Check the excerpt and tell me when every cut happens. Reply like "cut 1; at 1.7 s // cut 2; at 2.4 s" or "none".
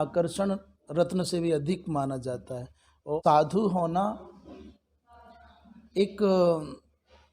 cut 1; at 3.2 s